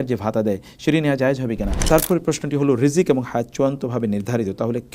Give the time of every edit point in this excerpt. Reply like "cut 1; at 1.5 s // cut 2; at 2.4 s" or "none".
cut 1; at 1.8 s